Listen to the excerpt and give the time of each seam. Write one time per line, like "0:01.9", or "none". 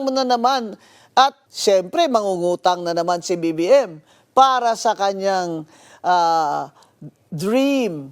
0:01.5